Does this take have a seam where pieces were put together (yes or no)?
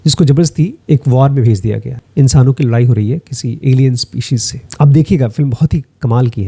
yes